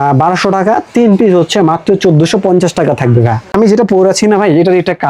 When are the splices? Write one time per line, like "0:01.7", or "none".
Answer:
0:03.7

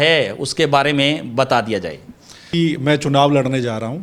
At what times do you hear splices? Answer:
0:02.5

